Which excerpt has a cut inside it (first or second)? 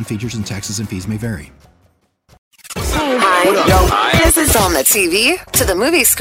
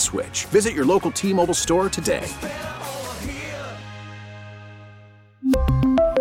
first